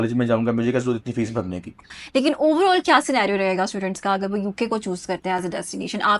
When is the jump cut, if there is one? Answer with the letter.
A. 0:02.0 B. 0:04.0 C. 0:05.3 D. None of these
A